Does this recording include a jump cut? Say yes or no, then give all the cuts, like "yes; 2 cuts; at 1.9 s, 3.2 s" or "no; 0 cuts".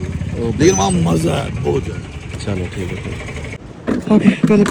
no; 0 cuts